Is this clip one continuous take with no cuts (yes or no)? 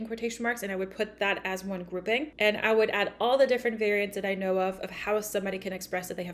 no